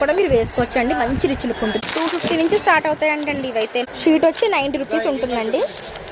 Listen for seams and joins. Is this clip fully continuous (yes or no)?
no